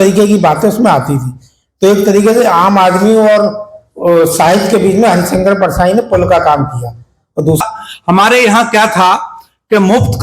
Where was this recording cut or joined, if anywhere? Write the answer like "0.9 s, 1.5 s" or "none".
7.6 s

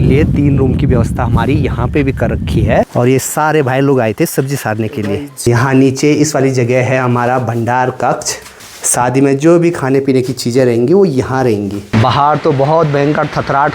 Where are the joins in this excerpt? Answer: 2.9 s, 5.3 s, 11.8 s

